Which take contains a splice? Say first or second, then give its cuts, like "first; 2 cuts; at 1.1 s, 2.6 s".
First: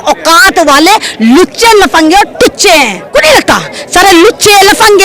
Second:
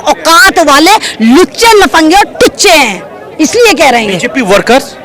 first; 1 cut; at 3.1 s